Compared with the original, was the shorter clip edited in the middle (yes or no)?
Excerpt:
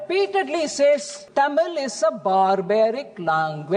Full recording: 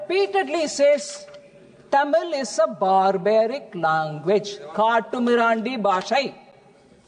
yes